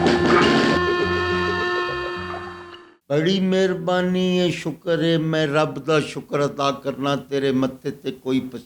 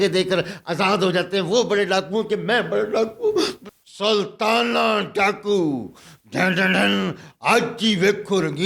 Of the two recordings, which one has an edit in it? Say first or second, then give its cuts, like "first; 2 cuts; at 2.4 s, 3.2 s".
second; 1 cut; at 3.6 s